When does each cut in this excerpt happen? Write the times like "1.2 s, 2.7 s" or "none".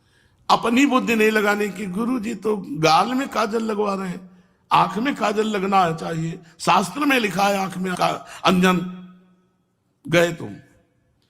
7.9 s